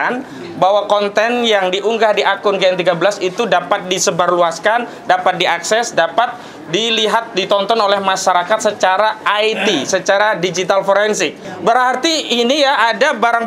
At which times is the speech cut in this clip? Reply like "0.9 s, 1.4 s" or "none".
11.4 s